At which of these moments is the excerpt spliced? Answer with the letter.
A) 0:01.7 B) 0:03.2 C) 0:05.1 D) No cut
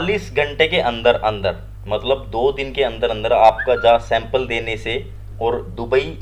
D